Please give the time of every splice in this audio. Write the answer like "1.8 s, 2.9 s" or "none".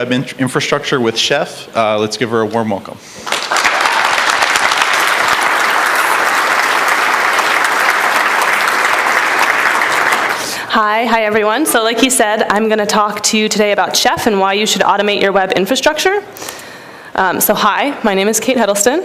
none